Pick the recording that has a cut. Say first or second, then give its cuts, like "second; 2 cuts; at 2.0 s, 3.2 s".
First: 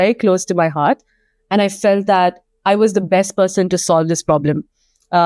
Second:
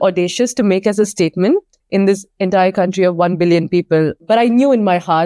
second; 2 cuts; at 1.7 s, 4.2 s